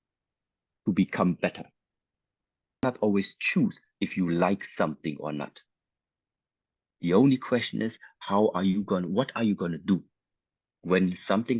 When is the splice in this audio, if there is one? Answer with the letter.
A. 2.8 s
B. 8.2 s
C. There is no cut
A